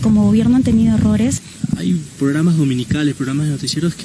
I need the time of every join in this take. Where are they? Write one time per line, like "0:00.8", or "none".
0:01.4